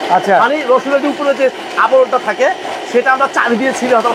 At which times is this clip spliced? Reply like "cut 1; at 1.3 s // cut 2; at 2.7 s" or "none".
none